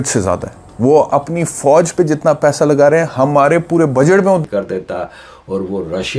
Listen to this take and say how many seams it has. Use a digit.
1